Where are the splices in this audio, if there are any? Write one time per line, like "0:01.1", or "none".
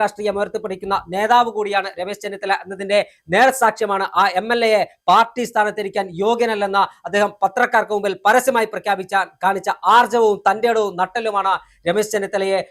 none